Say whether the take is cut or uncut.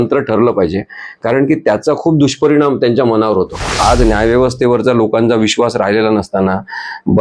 cut